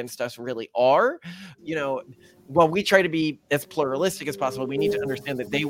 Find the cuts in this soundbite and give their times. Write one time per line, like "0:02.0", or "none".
0:01.5